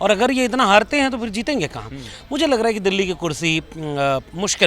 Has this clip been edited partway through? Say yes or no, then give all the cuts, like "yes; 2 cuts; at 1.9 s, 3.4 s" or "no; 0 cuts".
no; 0 cuts